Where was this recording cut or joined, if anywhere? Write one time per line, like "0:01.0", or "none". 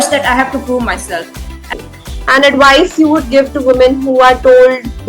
0:01.7